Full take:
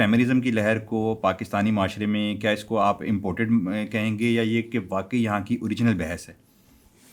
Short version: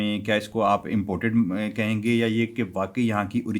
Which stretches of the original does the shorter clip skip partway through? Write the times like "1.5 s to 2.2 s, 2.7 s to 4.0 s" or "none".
none